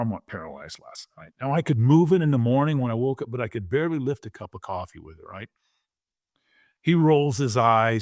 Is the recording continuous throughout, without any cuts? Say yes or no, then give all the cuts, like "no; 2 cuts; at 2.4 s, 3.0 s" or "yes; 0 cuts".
yes; 0 cuts